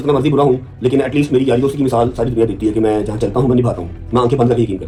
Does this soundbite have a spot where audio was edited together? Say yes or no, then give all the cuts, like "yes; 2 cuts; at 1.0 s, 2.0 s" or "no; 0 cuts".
no; 0 cuts